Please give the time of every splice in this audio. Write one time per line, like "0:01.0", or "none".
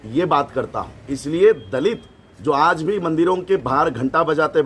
0:01.1